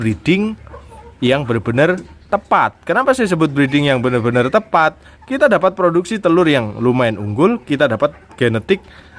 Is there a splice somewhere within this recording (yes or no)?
no